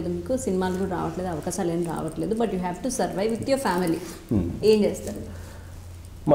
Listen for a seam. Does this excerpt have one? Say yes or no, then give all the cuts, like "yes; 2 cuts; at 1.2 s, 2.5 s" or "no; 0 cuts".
no; 0 cuts